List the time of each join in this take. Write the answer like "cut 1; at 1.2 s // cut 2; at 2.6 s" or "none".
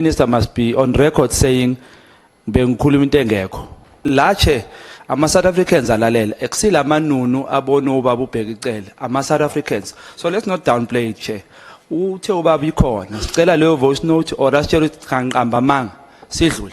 cut 1; at 4.1 s

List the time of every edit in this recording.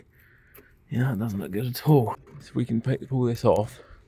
cut 1; at 2.1 s

